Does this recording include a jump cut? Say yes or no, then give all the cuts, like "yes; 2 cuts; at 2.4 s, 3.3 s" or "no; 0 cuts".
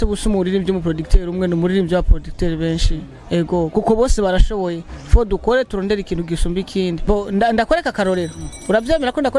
yes; 1 cut; at 7.0 s